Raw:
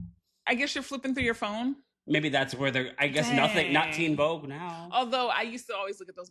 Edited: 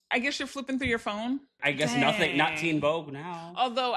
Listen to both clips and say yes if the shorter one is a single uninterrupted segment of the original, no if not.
no